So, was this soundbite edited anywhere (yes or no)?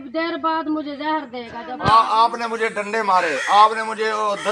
yes